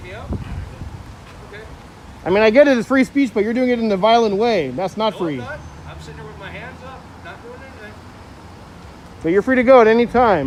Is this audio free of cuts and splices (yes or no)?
yes